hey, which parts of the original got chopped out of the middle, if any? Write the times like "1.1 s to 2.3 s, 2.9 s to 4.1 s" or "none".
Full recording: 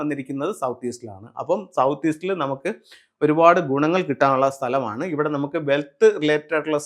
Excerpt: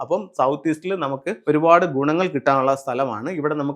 2.7 s to 3.1 s